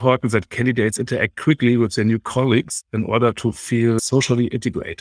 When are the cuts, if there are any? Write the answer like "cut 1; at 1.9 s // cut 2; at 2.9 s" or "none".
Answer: cut 1; at 4.0 s

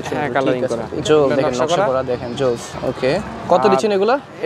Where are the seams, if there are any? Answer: cut 1; at 0.9 s // cut 2; at 3.4 s

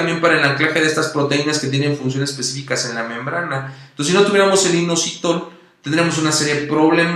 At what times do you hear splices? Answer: cut 1; at 4.7 s

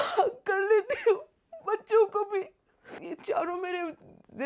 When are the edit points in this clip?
cut 1; at 3.0 s

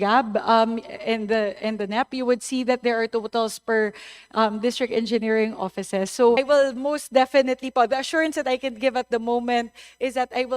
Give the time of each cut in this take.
cut 1; at 6.4 s

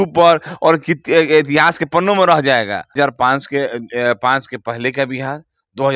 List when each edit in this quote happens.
cut 1; at 2.9 s

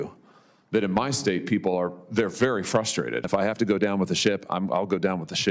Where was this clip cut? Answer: cut 1; at 3.3 s

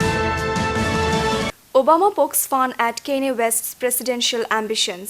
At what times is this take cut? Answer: cut 1; at 1.4 s

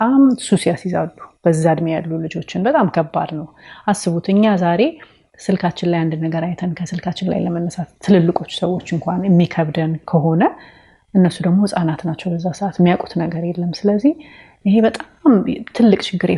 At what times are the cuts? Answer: none

